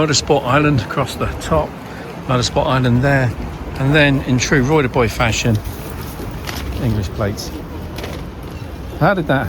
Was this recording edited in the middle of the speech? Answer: no; 0 cuts

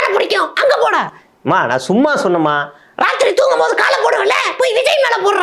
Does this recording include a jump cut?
no; 0 cuts

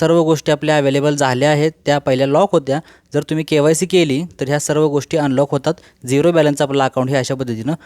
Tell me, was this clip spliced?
no; 0 cuts

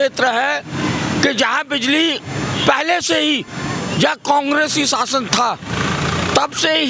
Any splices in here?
no; 0 cuts

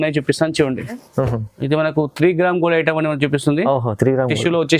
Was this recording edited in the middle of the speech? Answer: yes; 1 cut; at 1.0 s

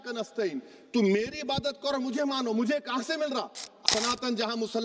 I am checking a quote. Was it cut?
yes; 1 cut; at 3.8 s

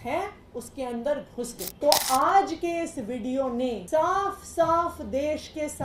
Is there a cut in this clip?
yes; 2 cuts; at 1.6 s, 3.8 s

